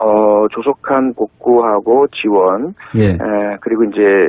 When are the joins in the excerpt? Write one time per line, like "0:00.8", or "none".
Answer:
0:03.3